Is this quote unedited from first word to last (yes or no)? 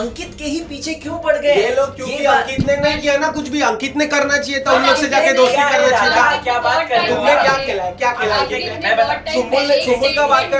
yes